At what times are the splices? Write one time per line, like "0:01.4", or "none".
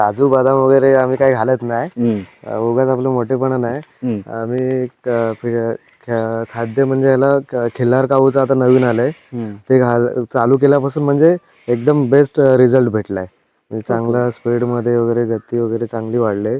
none